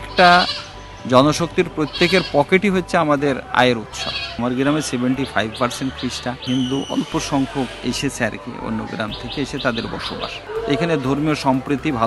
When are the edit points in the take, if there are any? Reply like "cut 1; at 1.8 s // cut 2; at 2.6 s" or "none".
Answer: cut 1; at 4.4 s // cut 2; at 6.4 s // cut 3; at 10.4 s